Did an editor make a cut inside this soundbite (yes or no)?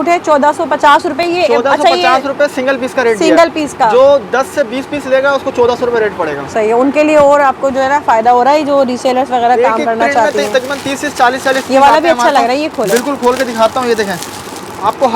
no